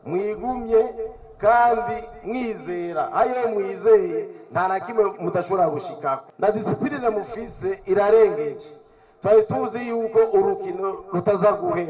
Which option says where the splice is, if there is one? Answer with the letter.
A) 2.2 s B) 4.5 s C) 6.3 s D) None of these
C